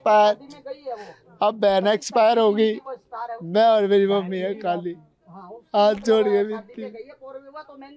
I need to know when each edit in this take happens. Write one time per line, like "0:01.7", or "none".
none